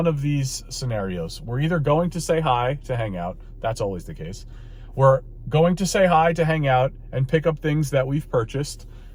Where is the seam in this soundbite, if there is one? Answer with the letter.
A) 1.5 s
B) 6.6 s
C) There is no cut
C